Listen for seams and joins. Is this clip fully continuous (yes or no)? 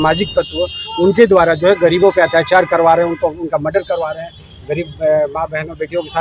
yes